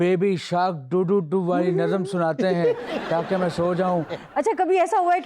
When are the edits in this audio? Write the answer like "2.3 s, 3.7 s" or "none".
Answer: 4.2 s